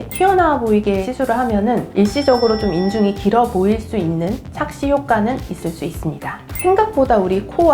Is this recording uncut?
no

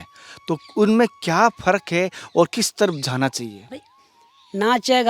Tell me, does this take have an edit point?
yes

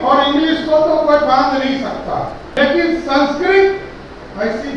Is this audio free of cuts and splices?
no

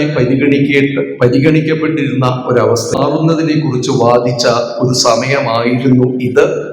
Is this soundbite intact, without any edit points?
no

